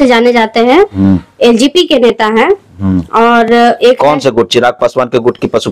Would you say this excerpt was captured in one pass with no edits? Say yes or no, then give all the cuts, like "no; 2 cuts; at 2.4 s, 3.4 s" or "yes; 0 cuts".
yes; 0 cuts